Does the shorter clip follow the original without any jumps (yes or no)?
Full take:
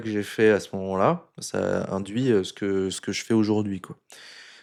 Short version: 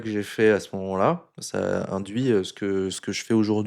yes